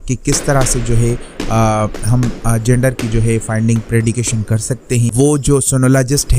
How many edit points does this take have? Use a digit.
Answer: 1